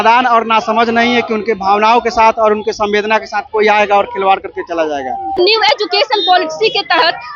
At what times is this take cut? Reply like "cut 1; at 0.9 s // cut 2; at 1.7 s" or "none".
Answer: cut 1; at 5.4 s